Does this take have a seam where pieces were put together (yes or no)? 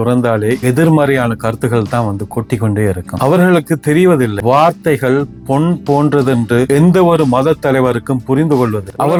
no